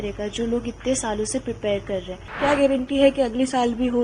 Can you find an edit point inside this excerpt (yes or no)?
yes